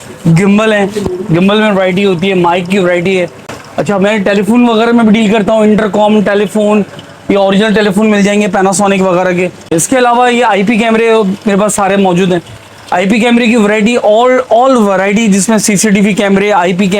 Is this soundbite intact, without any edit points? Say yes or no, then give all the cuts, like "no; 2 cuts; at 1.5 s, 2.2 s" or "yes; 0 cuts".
no; 1 cut; at 9.7 s